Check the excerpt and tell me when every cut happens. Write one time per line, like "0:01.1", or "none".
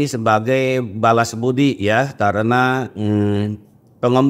none